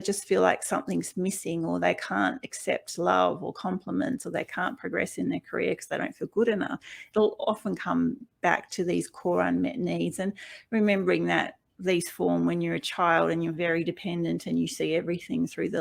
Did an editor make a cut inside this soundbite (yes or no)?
no